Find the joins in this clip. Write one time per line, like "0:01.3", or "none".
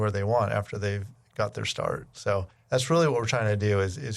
0:02.5